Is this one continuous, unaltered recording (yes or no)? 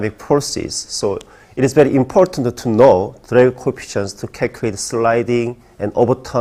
yes